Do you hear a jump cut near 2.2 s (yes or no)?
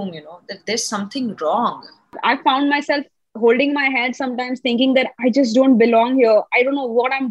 yes